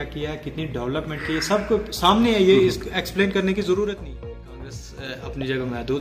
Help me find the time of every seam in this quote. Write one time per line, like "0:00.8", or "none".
0:04.6